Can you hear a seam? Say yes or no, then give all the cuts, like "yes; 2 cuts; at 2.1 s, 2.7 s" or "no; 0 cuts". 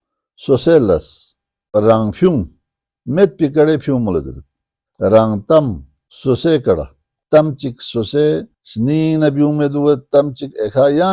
yes; 1 cut; at 1.7 s